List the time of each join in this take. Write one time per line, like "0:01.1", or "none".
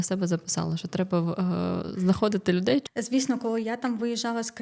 0:02.9